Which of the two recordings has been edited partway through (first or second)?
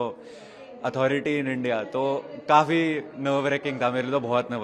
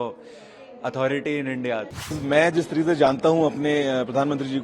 second